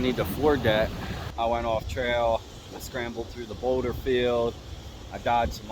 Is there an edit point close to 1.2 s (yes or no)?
yes